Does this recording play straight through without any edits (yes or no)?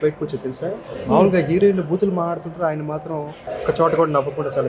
no